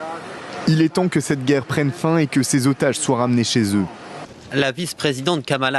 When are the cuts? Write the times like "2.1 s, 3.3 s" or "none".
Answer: 1.1 s, 4.9 s